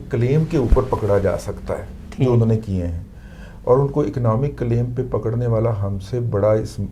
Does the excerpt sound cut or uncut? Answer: uncut